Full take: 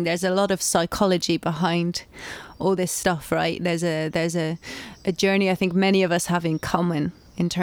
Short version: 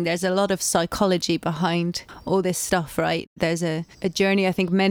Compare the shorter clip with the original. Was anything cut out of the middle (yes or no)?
yes